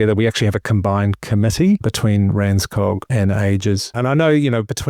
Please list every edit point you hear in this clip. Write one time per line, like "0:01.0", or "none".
0:01.9
0:03.1
0:03.9